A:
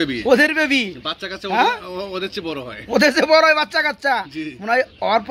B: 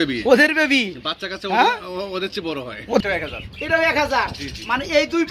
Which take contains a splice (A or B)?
B